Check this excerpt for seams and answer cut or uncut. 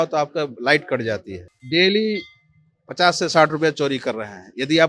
cut